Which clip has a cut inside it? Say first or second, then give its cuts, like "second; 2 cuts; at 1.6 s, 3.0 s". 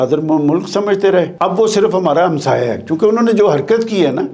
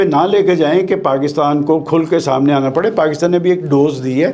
first; 1 cut; at 1.3 s